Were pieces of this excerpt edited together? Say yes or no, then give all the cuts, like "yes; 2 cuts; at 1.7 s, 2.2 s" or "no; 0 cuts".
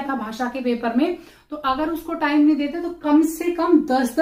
no; 0 cuts